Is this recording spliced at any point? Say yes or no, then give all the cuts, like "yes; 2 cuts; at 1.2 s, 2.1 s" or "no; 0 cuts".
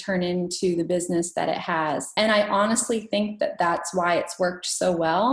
yes; 1 cut; at 2.1 s